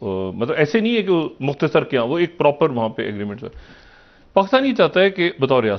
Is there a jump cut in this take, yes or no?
no